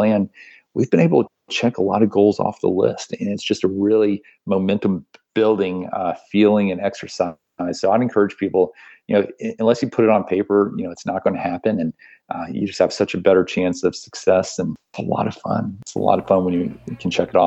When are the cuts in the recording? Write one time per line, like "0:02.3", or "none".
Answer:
0:14.9
0:15.8